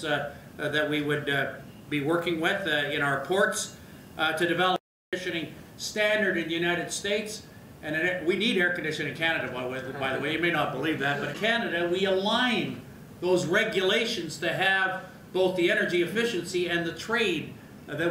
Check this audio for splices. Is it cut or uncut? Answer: cut